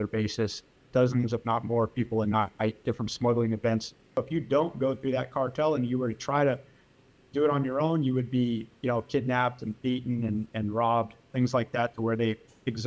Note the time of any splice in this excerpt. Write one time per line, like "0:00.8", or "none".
0:04.1